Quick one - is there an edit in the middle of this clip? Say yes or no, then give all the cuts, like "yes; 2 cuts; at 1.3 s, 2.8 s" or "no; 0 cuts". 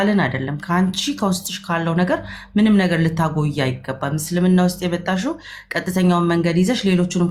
no; 0 cuts